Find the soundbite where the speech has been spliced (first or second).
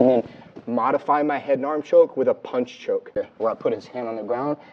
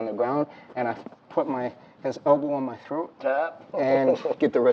first